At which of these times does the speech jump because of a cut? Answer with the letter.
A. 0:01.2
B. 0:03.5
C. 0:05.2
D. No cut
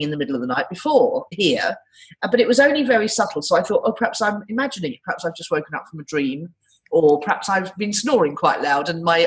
A